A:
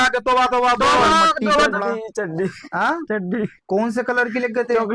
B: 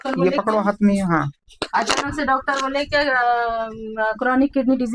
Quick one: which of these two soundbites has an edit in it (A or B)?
A